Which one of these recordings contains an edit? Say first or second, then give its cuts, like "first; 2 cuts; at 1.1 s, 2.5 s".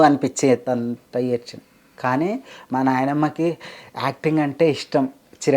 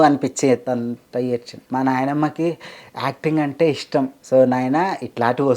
second; 2 cuts; at 1.6 s, 4.2 s